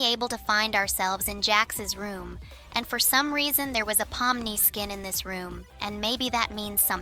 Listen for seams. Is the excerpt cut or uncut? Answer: uncut